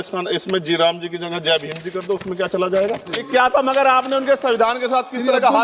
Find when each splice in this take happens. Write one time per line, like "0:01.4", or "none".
0:03.2